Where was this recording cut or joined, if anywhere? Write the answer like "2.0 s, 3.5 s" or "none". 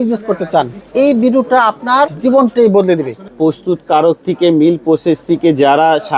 0.8 s, 2.1 s, 3.3 s